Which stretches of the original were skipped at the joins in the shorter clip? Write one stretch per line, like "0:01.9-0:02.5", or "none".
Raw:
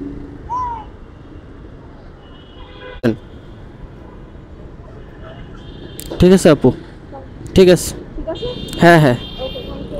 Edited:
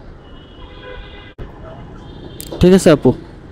0:03.0-0:04.6